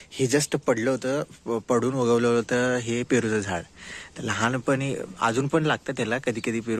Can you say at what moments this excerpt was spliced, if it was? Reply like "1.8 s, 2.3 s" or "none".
none